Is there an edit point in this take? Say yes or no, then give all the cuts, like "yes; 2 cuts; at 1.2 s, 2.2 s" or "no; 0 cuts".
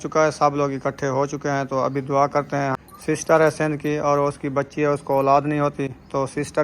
yes; 1 cut; at 2.9 s